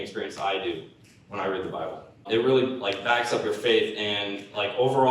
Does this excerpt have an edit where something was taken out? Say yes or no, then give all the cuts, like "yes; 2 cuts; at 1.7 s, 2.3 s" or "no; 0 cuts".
yes; 1 cut; at 2.2 s